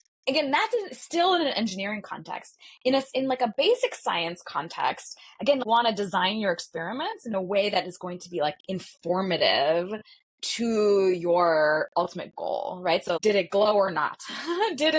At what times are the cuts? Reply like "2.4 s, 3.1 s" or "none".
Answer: 5.6 s, 13.2 s